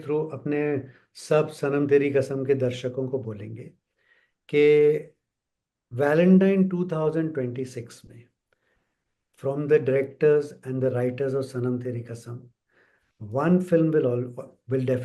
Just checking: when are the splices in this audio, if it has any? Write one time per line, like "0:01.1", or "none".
none